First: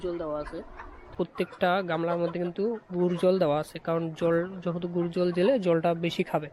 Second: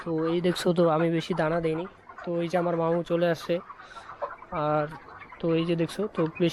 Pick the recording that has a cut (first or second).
first